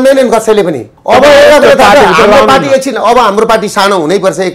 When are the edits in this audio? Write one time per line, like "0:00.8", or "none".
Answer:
0:00.9